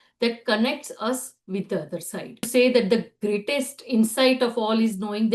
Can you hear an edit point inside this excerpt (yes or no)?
yes